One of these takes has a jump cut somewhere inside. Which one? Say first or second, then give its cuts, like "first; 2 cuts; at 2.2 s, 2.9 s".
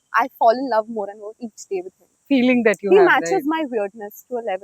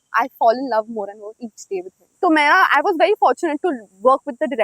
second; 1 cut; at 2.0 s